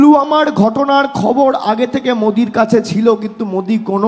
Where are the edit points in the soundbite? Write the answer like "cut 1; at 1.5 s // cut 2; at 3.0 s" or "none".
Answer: none